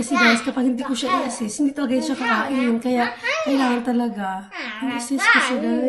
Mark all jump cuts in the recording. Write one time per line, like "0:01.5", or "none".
none